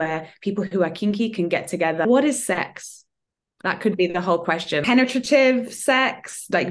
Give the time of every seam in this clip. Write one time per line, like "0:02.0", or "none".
0:02.0
0:04.8